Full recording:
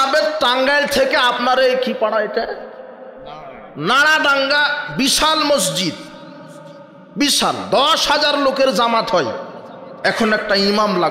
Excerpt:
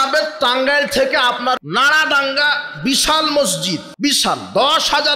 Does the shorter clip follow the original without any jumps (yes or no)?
no